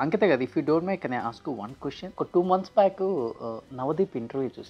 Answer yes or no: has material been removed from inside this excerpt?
yes